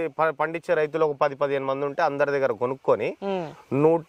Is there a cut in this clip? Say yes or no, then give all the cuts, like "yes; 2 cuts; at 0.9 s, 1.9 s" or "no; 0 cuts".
no; 0 cuts